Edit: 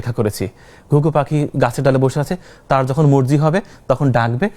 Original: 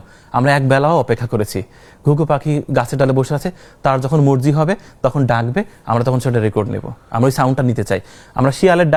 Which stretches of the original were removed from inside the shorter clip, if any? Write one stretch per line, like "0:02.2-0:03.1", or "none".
none

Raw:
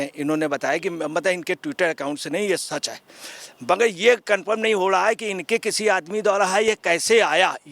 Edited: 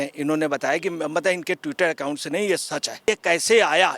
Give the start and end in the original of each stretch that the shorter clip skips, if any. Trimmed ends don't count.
0:03.1-0:06.7

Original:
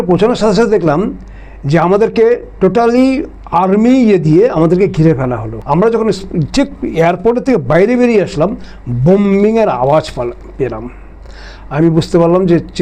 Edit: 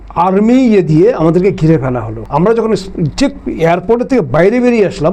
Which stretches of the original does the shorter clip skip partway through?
none

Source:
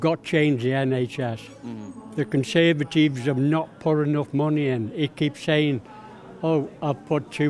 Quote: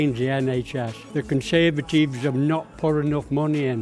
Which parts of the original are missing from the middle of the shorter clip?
0:01.4-0:02.0

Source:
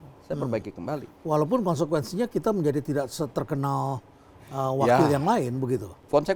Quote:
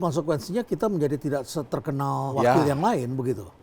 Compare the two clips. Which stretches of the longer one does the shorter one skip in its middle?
0:04.0-0:04.8

